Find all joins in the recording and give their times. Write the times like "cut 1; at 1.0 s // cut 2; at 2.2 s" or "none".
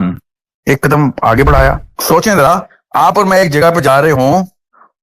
cut 1; at 1.9 s

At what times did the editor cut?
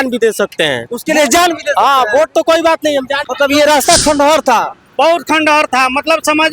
cut 1; at 3.2 s

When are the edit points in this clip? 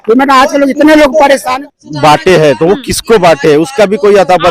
cut 1; at 1.5 s

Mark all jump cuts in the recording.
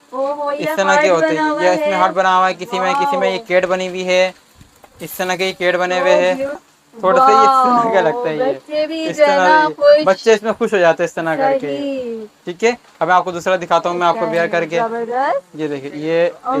cut 1; at 6.7 s

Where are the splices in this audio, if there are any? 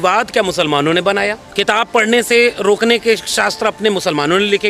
cut 1; at 1.4 s

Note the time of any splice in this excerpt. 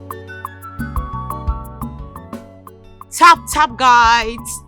cut 1; at 2.1 s

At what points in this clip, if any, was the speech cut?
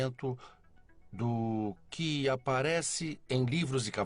cut 1; at 3.0 s

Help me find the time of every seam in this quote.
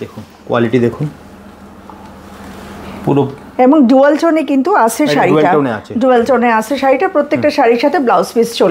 none

